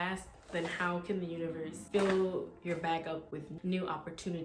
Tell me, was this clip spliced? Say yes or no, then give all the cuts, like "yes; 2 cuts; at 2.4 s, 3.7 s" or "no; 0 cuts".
yes; 2 cuts; at 1.8 s, 3.5 s